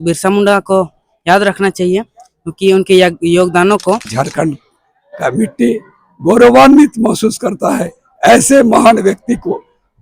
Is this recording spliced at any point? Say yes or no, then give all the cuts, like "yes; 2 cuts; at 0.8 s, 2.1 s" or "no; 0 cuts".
yes; 1 cut; at 4.1 s